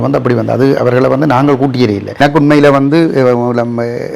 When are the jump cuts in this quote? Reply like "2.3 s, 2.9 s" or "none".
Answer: 2.2 s